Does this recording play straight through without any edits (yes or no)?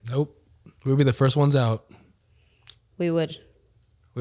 yes